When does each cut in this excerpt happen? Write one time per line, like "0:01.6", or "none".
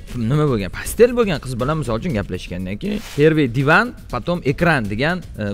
0:03.0